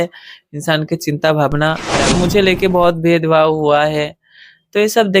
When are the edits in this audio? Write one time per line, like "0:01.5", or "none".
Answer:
0:02.1